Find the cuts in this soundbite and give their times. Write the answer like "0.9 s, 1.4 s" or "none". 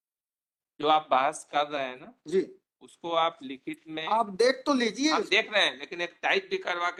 none